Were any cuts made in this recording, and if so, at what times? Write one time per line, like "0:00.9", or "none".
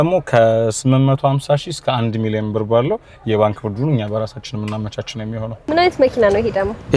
0:05.6